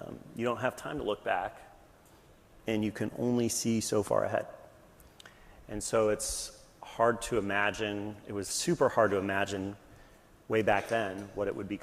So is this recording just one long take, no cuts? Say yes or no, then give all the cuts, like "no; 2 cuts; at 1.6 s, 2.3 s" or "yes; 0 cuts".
yes; 0 cuts